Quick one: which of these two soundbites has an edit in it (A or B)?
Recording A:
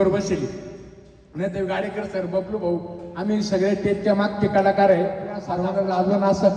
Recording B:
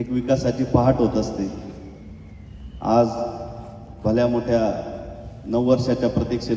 A